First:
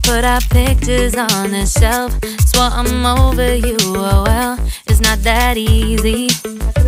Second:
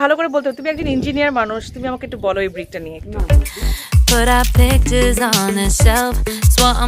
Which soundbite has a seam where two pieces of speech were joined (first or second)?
second